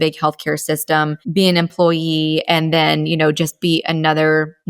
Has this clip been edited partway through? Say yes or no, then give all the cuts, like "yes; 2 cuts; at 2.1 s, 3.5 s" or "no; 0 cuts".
yes; 1 cut; at 1.2 s